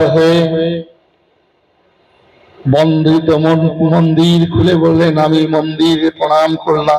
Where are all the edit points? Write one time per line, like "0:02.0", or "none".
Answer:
none